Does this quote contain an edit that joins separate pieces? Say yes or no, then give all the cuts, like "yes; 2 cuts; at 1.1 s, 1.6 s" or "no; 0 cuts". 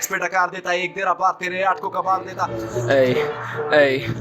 yes; 1 cut; at 2.6 s